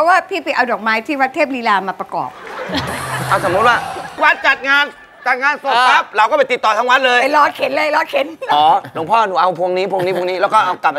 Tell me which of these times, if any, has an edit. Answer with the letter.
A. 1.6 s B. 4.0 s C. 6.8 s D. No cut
B